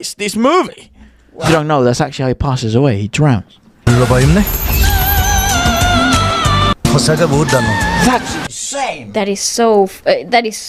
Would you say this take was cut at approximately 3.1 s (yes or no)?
no